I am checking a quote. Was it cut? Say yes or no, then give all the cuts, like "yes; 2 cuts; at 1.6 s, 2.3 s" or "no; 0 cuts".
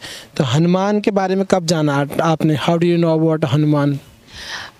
no; 0 cuts